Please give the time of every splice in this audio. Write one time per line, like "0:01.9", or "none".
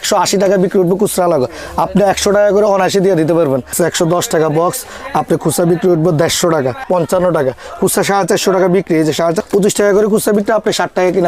0:03.7
0:06.8
0:09.4